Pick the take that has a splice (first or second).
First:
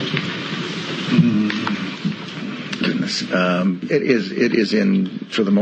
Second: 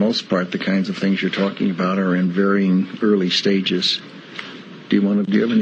first